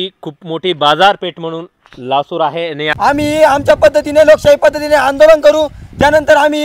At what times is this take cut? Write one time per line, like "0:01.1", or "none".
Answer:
0:02.9